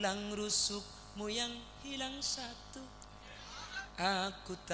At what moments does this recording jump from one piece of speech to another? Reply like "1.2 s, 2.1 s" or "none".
3.8 s